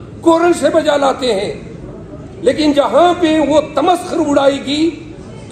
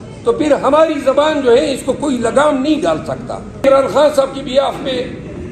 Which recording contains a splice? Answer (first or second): second